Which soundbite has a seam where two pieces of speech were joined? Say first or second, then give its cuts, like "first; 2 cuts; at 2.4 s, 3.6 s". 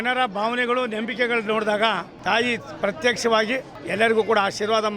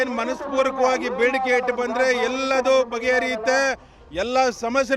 first; 2 cuts; at 2.1 s, 3.8 s